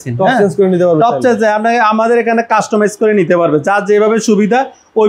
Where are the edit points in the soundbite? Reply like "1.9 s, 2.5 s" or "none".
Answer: none